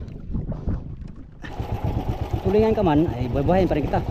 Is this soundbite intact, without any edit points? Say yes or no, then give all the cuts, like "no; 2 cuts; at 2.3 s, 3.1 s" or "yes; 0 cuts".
no; 1 cut; at 1.5 s